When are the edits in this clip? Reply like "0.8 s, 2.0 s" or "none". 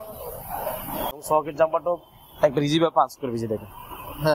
1.2 s